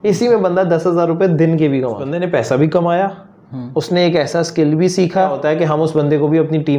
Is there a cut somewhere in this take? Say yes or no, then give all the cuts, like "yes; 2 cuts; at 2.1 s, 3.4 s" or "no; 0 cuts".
yes; 2 cuts; at 2.1 s, 5.4 s